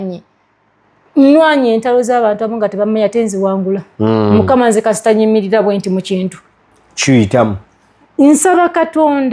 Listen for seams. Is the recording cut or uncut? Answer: uncut